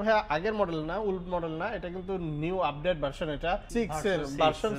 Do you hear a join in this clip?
no; 0 cuts

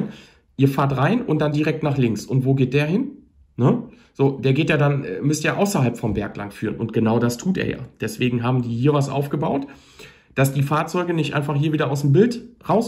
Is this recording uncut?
yes; 0 cuts

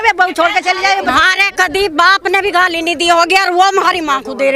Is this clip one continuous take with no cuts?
no; 1 cut; at 1.1 s

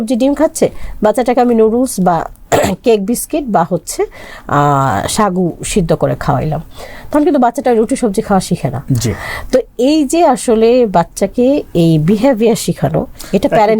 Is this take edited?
no; 0 cuts

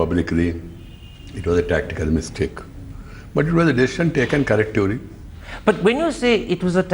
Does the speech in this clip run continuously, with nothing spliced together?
no; 1 cut; at 1.0 s

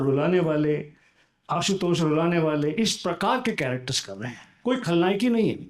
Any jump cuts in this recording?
no; 0 cuts

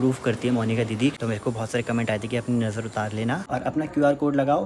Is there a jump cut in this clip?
yes; 2 cuts; at 1.1 s, 3.5 s

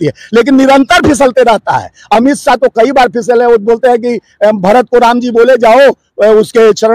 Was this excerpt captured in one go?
yes; 0 cuts

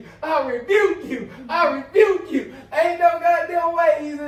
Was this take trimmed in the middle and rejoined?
no; 0 cuts

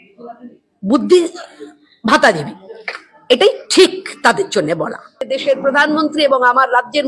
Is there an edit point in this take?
yes; 1 cut; at 5.2 s

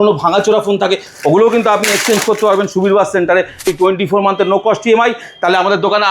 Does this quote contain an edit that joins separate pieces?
yes; 1 cut; at 3.6 s

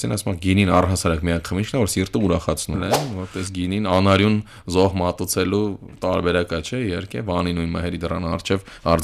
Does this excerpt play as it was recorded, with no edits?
no; 1 cut; at 2.8 s

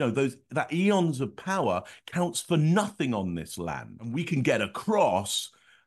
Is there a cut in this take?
yes; 1 cut; at 4.2 s

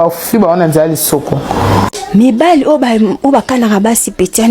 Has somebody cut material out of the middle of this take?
yes; 1 cut; at 2.0 s

